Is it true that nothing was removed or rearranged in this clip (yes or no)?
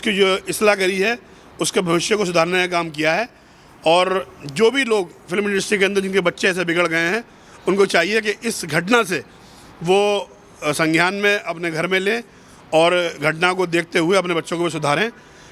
yes